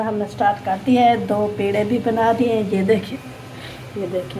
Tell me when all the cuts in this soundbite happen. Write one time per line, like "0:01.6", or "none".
0:03.0